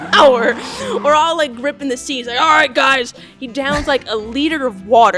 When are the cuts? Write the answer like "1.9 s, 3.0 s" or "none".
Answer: none